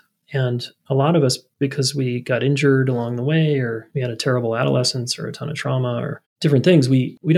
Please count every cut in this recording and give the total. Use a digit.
2